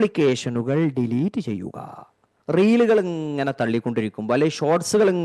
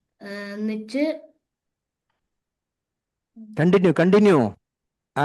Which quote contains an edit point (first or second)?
first